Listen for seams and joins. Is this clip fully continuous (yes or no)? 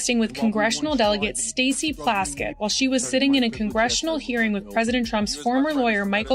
yes